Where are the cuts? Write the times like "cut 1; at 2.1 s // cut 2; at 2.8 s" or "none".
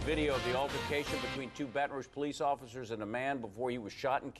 none